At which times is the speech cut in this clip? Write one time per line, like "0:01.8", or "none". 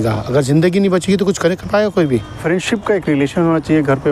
0:02.3

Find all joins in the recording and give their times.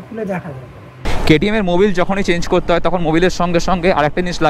0:01.1

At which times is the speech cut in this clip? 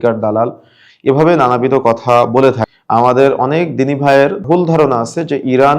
0:02.7
0:04.4

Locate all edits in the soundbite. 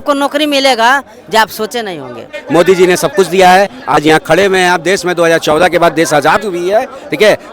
0:02.3

